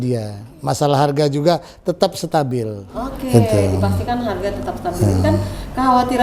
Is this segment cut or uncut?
uncut